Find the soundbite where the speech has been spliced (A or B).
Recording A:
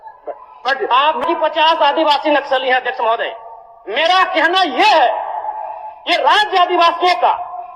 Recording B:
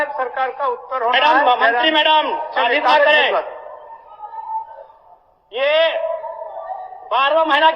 A